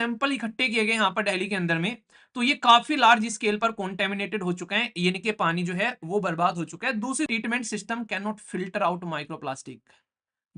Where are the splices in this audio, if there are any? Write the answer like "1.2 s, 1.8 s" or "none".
7.3 s